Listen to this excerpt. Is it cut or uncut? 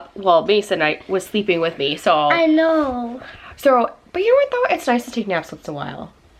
uncut